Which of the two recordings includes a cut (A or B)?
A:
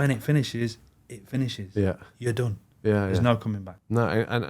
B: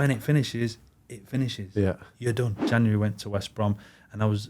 B